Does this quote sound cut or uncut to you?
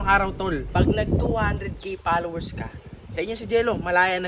uncut